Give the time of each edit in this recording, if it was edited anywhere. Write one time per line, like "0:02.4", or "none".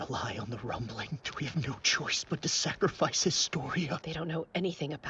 0:01.3
0:04.0